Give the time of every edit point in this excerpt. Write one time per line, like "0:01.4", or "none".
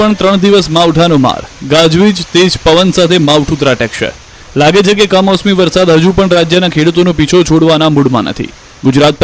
none

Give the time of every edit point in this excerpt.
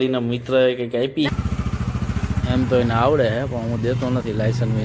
0:01.3

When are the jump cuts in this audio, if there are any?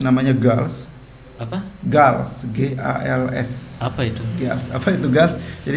none

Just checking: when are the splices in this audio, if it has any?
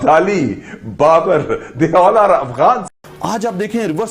0:03.0

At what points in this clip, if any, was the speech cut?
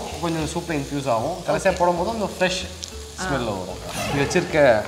0:04.0

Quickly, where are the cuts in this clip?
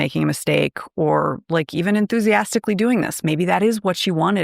0:03.2

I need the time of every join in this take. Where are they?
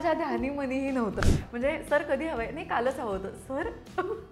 0:01.2

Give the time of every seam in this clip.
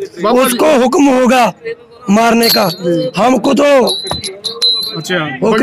none

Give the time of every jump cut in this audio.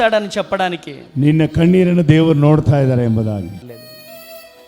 0:03.6

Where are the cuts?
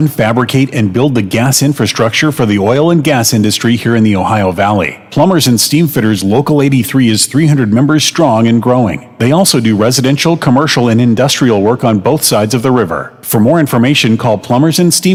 none

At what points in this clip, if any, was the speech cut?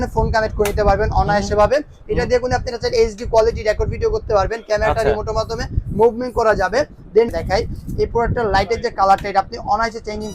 0:07.3

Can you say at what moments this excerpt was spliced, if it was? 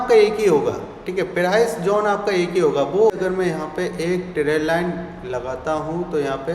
0:03.1

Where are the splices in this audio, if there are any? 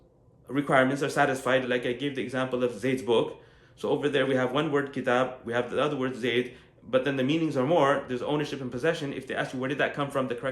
0:01.7

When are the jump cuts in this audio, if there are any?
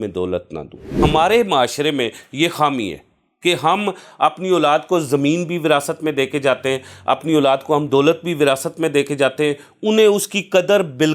0:00.9

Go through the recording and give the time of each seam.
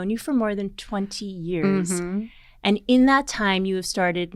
none

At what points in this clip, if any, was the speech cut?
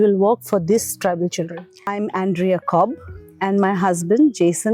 0:01.8

